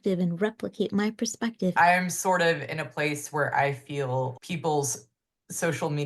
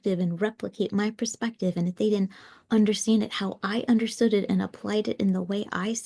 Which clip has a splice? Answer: first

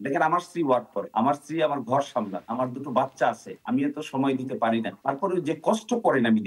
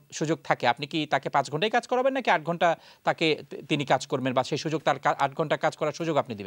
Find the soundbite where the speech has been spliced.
first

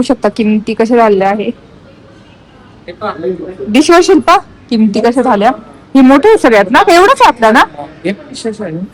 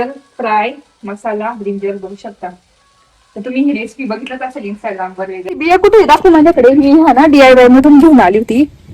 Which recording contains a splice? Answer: second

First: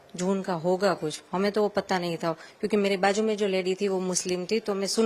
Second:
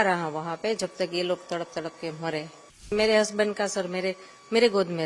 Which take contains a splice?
second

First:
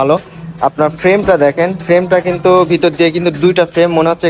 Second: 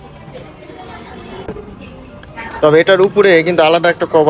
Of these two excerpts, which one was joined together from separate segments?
second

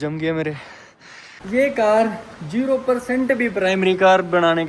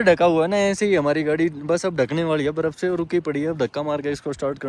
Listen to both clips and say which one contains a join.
first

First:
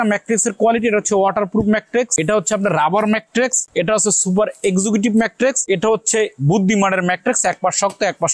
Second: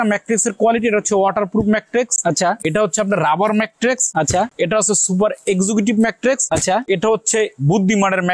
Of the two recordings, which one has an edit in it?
first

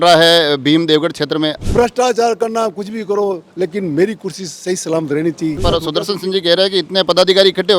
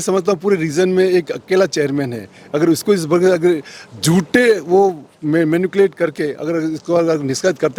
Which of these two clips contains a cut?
first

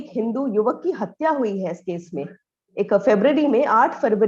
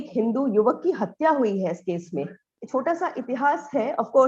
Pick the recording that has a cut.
second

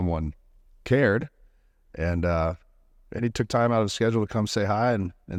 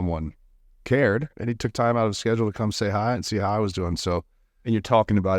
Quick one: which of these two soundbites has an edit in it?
second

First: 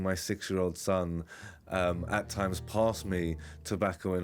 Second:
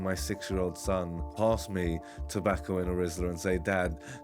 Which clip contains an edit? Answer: second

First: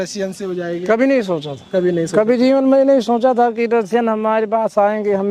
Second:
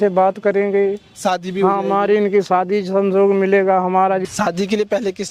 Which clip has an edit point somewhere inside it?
second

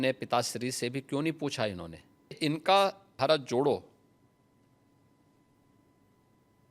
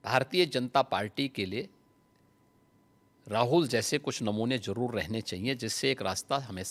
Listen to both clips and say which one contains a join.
first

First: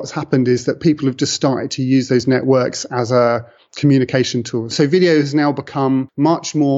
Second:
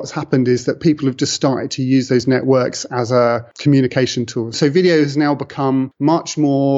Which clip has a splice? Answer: second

